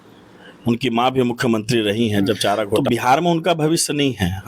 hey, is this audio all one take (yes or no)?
no